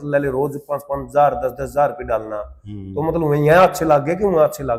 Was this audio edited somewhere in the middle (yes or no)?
no